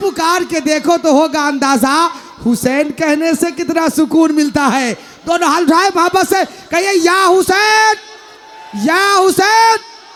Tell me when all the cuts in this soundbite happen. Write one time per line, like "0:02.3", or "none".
none